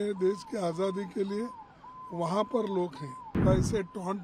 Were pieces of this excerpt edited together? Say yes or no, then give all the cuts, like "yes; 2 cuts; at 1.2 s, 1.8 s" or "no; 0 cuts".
yes; 1 cut; at 3.3 s